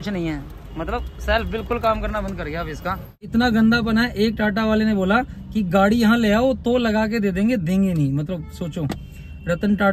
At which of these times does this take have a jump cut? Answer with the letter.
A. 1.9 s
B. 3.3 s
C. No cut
B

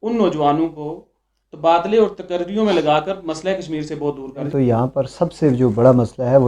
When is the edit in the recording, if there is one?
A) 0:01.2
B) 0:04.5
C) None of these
B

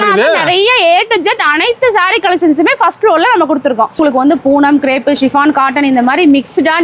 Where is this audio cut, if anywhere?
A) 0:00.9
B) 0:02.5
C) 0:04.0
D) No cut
C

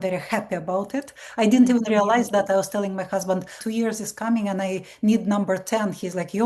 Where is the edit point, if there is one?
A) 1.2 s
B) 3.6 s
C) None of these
B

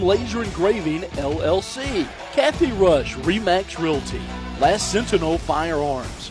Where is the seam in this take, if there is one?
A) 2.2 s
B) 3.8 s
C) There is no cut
A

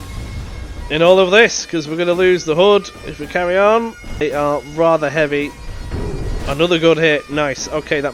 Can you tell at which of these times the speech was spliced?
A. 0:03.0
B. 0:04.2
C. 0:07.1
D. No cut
B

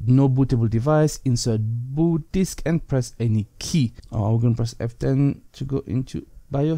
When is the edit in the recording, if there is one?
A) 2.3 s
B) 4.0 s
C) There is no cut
B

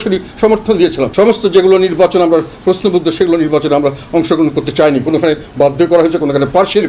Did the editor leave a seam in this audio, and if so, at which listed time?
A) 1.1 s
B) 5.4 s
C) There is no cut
A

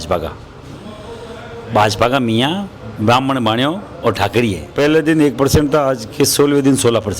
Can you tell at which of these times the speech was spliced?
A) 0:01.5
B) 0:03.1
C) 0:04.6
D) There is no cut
C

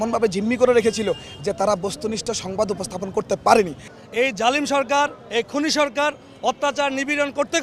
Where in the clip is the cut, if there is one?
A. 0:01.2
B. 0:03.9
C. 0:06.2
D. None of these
B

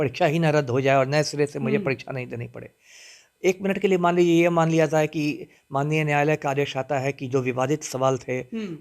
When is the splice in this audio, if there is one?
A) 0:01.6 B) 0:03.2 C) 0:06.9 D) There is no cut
D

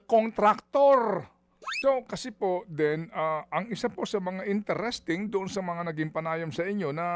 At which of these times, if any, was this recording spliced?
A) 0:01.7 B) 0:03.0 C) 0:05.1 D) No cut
A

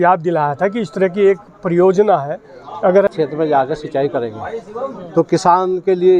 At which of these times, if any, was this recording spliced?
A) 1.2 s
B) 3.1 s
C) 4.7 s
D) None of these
B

